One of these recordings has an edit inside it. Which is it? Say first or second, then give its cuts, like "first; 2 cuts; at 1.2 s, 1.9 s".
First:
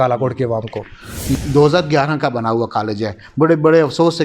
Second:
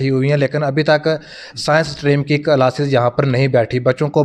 first; 1 cut; at 1.3 s